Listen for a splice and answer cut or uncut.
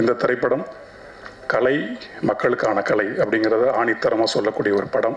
uncut